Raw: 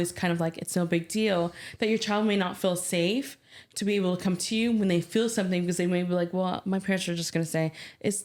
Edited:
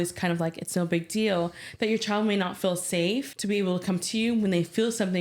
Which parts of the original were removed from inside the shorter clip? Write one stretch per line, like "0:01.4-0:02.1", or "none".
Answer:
0:03.3-0:03.7